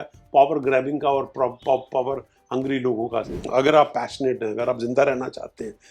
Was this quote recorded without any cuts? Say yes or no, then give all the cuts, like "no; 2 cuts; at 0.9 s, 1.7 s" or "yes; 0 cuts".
no; 1 cut; at 3.4 s